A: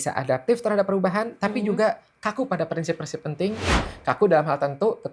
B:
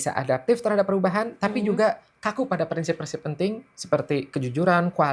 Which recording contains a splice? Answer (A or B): A